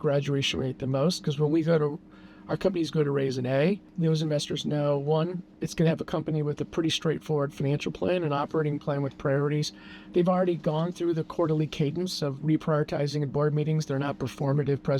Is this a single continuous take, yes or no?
yes